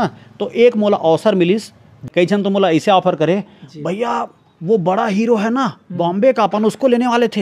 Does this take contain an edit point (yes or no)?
yes